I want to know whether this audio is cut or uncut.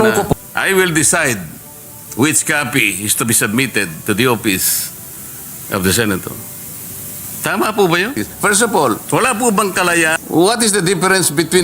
cut